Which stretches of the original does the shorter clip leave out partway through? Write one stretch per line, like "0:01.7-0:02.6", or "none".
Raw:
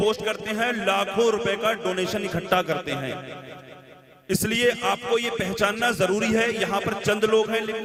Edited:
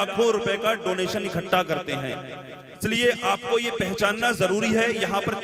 0:03.8-0:04.4